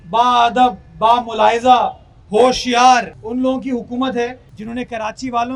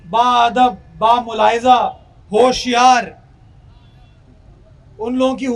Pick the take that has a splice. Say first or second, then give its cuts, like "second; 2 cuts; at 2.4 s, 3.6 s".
first; 2 cuts; at 3.2 s, 4.5 s